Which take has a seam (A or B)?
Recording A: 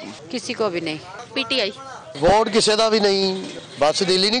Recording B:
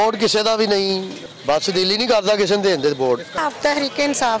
B